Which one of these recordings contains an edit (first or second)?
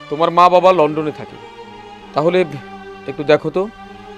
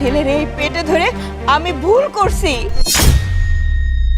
second